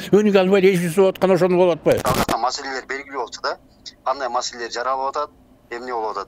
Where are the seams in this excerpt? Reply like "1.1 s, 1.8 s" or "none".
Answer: 2.0 s